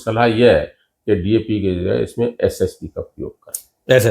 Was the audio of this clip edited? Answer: no; 0 cuts

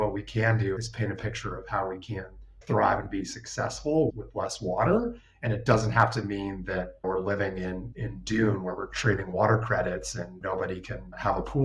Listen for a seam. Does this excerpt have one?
yes; 2 cuts; at 2.6 s, 7.9 s

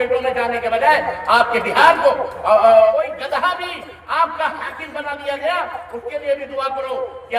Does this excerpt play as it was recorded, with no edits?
no; 1 cut; at 2.9 s

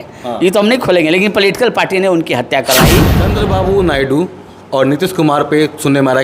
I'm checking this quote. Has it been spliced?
yes; 1 cut; at 3.2 s

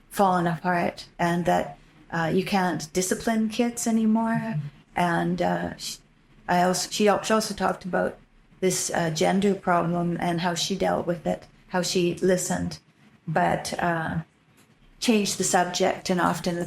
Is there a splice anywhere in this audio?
no; 0 cuts

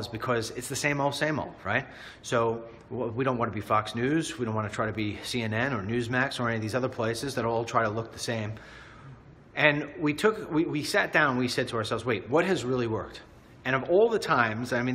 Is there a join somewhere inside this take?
no; 0 cuts

